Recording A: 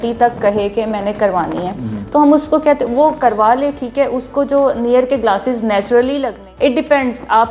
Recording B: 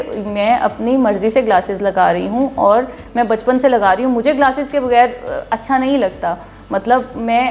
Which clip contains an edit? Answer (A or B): A